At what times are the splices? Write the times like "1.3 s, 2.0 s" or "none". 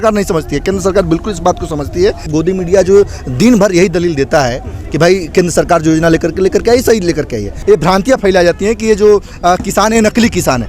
2.2 s, 7.5 s